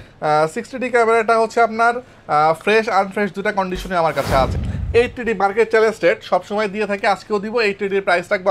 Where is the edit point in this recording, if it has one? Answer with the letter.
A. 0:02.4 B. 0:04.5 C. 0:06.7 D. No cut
B